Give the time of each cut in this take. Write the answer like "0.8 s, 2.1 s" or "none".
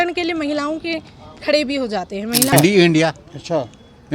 2.5 s